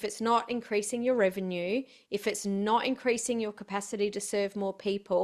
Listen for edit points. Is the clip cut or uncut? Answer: uncut